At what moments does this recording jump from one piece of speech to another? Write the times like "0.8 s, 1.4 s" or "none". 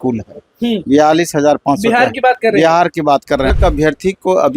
3.5 s